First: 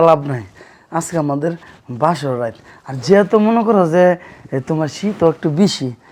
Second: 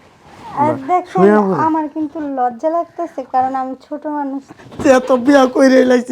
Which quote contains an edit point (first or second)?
second